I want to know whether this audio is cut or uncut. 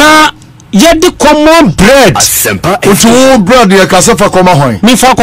uncut